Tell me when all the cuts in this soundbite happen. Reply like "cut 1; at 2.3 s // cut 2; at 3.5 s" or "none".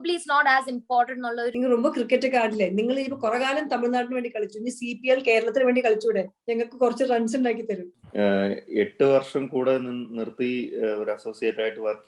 cut 1; at 1.5 s // cut 2; at 8.0 s